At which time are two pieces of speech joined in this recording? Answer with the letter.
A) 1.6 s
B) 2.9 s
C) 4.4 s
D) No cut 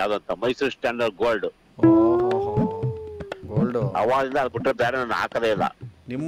D